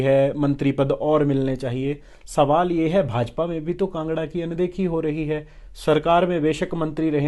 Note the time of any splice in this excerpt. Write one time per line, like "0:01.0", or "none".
none